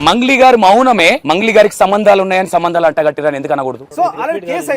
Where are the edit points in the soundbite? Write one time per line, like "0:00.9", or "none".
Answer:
0:01.2
0:03.8